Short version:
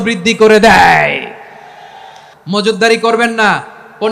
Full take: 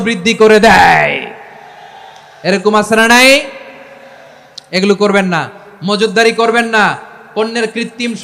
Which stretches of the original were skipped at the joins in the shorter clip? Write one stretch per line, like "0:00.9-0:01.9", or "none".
0:02.2-0:05.6